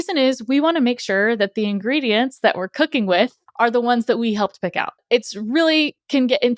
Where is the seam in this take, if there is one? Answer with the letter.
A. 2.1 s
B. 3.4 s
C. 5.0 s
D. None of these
C